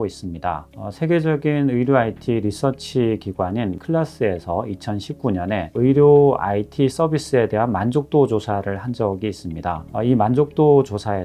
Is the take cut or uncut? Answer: cut